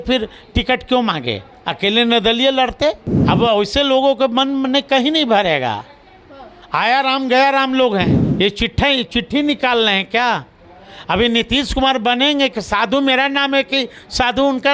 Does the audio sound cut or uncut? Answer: cut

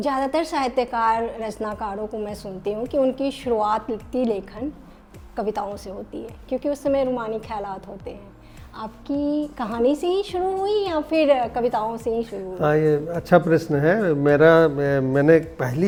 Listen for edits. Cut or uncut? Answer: uncut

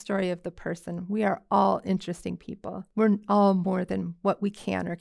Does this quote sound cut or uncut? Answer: cut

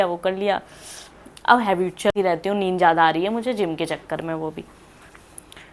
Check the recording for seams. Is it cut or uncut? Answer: cut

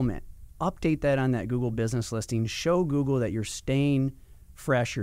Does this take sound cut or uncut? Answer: uncut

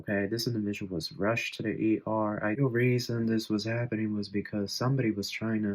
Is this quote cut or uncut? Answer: cut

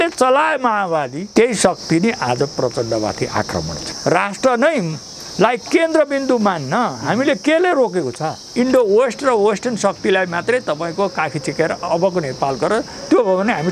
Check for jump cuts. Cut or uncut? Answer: cut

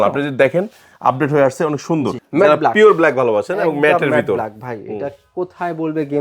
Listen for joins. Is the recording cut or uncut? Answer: cut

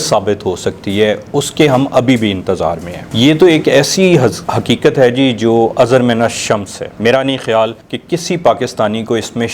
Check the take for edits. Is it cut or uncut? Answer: uncut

